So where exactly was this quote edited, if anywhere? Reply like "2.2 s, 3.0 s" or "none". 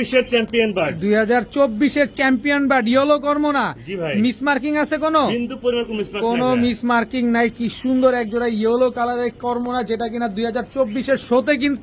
none